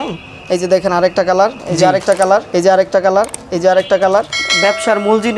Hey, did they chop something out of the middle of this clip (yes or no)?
yes